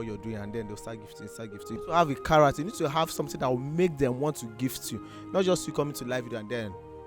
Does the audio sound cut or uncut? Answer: cut